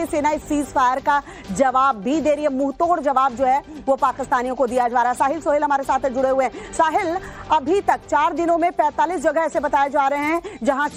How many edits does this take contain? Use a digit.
0